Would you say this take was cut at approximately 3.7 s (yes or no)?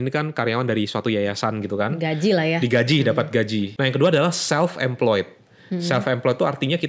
yes